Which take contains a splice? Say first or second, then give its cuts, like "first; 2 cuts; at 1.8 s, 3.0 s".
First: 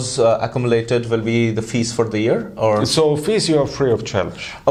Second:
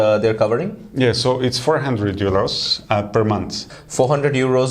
second; 1 cut; at 3.6 s